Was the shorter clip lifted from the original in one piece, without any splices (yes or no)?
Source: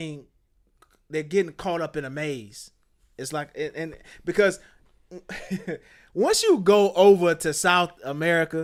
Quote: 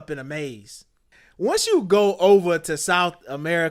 no